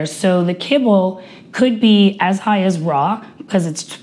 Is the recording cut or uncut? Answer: uncut